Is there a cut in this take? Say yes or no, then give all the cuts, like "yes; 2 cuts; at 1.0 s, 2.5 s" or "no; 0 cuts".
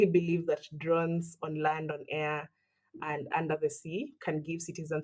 no; 0 cuts